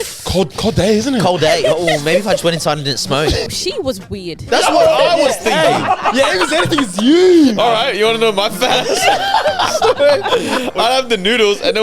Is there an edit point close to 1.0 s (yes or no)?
no